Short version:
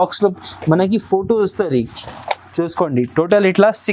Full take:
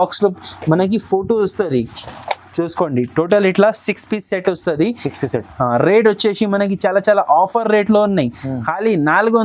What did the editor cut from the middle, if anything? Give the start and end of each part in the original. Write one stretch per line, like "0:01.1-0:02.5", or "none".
none